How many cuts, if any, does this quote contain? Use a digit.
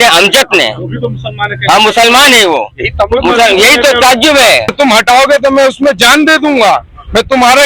1